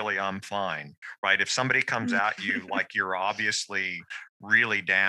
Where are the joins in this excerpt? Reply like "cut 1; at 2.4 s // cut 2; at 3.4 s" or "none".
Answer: none